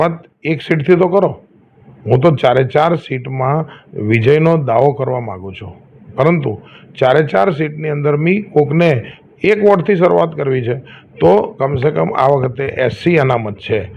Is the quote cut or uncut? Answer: uncut